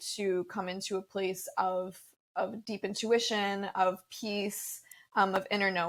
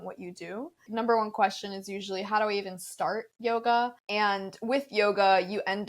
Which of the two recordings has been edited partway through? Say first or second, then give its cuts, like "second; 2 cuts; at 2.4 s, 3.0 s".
second; 2 cuts; at 0.9 s, 4.0 s